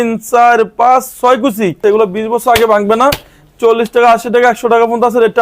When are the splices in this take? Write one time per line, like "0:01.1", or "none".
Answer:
0:01.8